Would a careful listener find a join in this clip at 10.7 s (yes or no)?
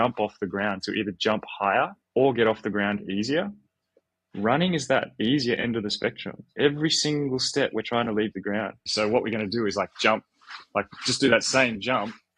no